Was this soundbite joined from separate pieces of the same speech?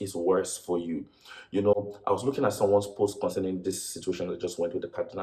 no; 0 cuts

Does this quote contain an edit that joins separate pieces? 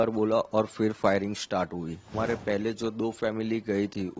yes; 1 cut; at 2.1 s

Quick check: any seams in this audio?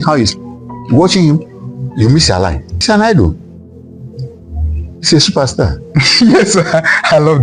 no; 0 cuts

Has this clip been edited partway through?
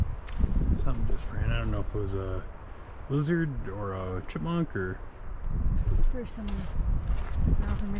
yes; 1 cut; at 5.3 s

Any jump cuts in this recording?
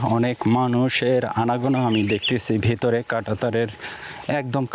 no; 0 cuts

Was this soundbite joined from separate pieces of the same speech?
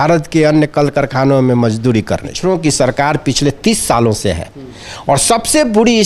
yes; 1 cut; at 2.3 s

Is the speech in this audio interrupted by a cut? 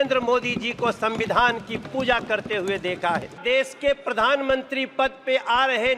yes; 1 cut; at 3.4 s

